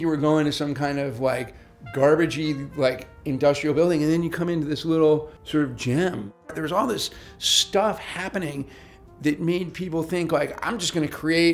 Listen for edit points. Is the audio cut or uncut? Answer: cut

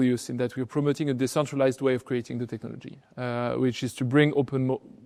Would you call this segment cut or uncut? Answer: uncut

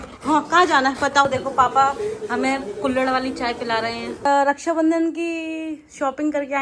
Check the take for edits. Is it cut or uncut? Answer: cut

